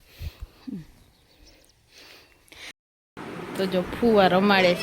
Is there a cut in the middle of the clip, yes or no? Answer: yes